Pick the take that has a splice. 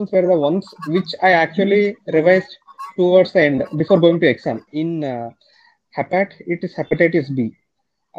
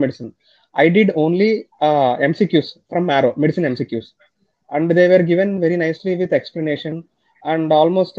first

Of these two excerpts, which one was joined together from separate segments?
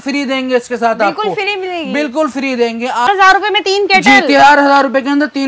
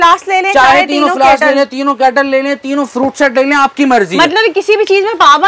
first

